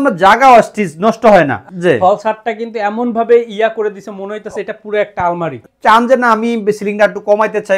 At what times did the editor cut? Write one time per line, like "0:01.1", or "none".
0:01.6
0:05.6